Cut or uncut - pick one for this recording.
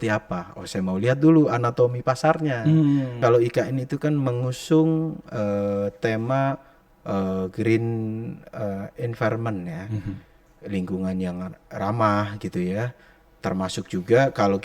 cut